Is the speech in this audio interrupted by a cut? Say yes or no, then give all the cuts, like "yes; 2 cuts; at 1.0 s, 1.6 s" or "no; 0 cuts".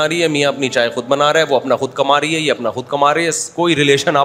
no; 0 cuts